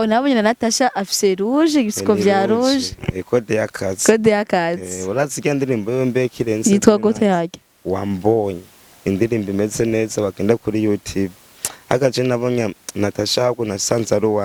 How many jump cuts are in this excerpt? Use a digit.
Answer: 0